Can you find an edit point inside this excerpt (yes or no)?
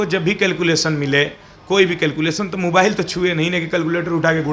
no